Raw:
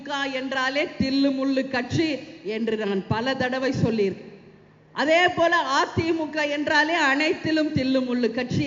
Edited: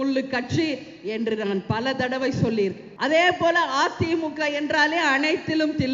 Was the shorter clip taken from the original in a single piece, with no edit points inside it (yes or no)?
no